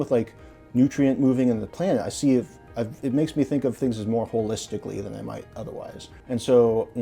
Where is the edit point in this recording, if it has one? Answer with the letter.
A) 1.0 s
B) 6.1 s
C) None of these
B